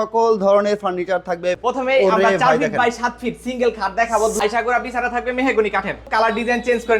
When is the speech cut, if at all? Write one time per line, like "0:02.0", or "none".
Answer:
0:01.6
0:04.4
0:06.3